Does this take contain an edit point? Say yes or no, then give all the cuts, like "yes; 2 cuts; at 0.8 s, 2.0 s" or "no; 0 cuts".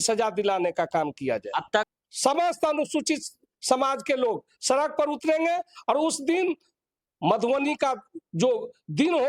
yes; 1 cut; at 1.9 s